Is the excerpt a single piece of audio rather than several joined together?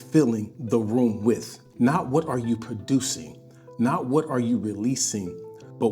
no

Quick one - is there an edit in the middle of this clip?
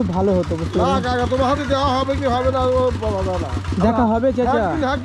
no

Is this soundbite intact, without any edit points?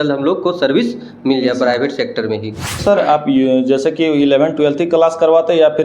no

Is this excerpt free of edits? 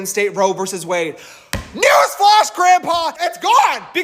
no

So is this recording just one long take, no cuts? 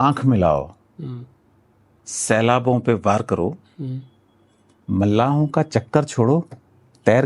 yes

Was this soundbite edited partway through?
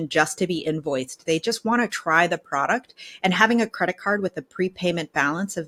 no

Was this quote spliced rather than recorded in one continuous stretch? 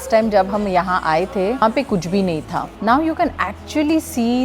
no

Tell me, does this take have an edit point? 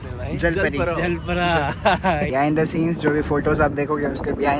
yes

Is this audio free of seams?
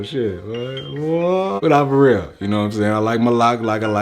no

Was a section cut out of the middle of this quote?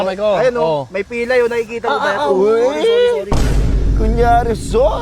no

